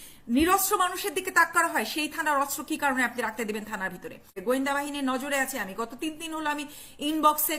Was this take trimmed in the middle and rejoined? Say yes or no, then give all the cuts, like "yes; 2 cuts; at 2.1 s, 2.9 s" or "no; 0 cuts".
yes; 1 cut; at 4.4 s